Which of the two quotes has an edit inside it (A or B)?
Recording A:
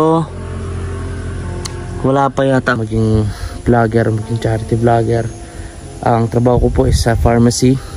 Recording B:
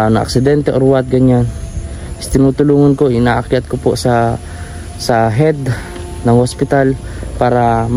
A